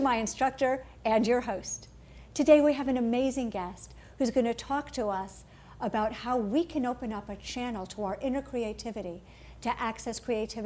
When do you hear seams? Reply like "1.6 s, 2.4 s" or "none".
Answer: 2.5 s